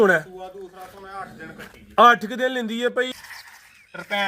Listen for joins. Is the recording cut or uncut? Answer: cut